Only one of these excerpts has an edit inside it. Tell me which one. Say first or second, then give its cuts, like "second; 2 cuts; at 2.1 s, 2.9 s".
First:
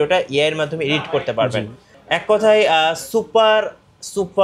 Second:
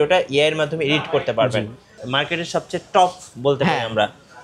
second; 1 cut; at 1.9 s